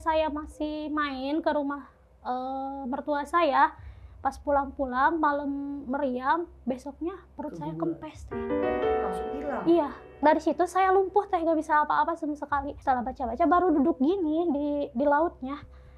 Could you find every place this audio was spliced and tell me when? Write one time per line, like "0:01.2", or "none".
0:10.0
0:12.7